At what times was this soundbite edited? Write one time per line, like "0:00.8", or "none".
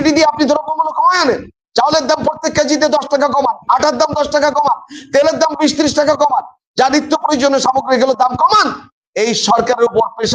0:09.0